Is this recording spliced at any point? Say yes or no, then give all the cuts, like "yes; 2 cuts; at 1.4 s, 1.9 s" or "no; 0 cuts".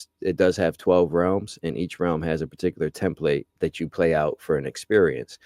yes; 1 cut; at 3.5 s